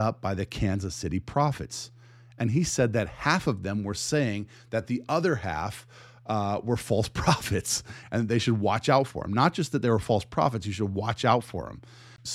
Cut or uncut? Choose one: uncut